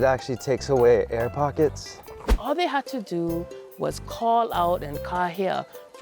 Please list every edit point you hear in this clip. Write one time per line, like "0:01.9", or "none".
0:02.3